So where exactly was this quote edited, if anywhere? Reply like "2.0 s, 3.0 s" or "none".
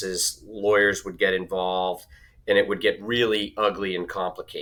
none